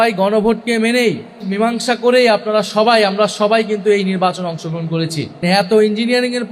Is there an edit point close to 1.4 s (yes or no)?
yes